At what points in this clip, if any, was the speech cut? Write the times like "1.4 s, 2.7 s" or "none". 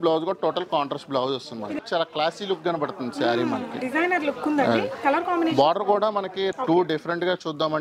1.8 s, 6.5 s